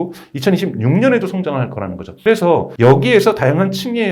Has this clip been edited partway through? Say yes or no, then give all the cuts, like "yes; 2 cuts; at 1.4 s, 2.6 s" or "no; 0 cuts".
no; 0 cuts